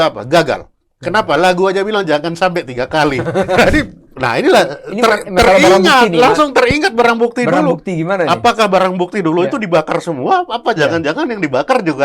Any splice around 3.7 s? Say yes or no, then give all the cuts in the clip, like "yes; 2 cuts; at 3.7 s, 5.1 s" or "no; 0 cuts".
yes; 1 cut; at 3.7 s